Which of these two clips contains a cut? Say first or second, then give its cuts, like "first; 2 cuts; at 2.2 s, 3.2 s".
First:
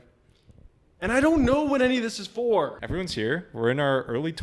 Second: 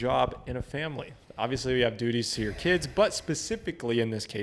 first; 1 cut; at 2.8 s